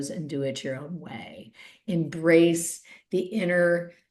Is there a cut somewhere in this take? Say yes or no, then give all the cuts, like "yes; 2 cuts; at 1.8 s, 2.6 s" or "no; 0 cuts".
no; 0 cuts